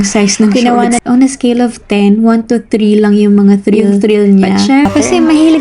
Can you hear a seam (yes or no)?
yes